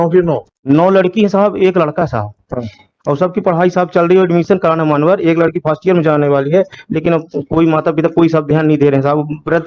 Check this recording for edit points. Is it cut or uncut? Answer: uncut